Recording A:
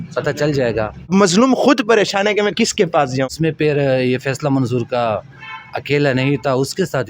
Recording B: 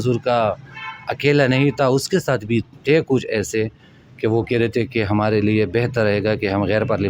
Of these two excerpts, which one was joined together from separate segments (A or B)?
A